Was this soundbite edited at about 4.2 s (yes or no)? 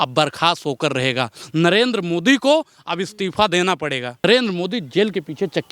yes